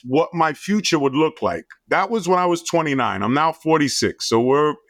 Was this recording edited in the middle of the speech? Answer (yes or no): no